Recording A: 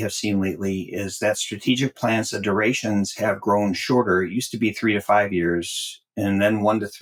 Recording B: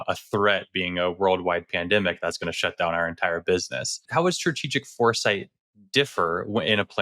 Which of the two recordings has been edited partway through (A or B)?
B